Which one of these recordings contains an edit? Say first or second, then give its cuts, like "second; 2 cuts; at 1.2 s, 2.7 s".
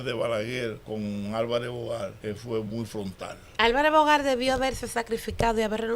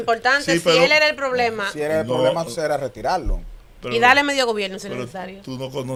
first; 3 cuts; at 0.8 s, 2.2 s, 3.4 s